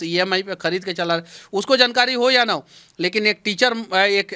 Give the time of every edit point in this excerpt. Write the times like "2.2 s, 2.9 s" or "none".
none